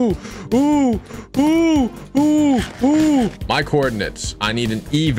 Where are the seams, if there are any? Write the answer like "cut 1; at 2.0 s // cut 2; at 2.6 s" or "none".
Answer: cut 1; at 3.4 s